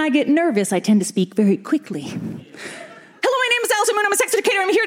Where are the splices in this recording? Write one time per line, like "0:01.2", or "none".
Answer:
0:03.1